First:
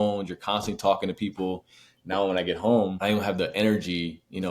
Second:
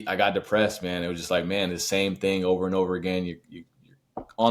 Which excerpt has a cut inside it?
first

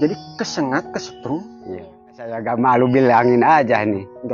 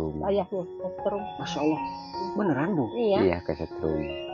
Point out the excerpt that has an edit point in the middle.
first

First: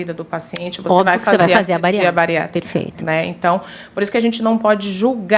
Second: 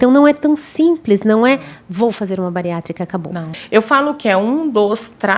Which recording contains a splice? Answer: second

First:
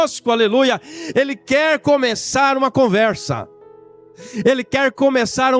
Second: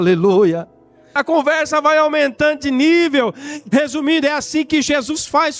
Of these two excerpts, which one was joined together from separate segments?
second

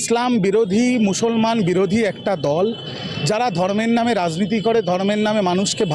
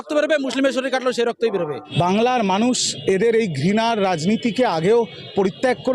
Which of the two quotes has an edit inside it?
second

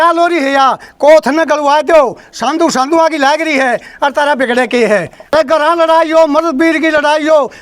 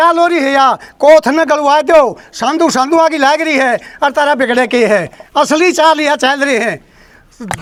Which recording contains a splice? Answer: first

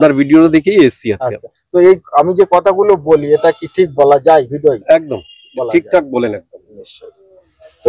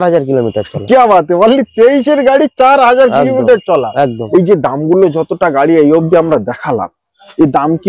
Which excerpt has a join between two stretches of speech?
second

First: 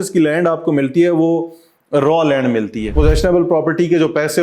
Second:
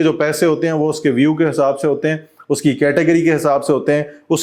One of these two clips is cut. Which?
first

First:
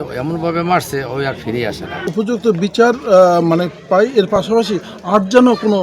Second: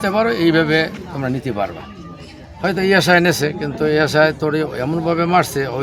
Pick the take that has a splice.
first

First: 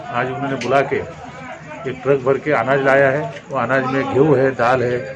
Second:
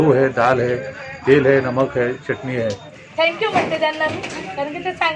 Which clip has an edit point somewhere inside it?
second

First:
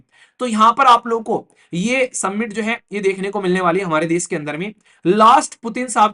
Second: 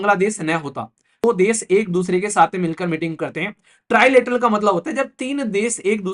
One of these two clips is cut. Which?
second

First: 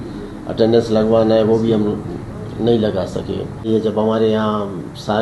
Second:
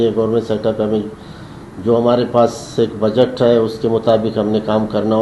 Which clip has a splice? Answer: first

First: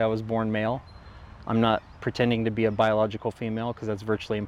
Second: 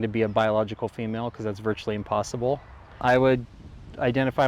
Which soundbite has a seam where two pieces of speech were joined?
second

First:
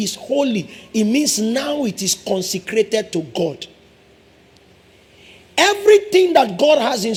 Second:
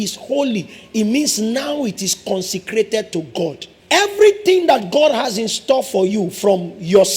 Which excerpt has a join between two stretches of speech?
second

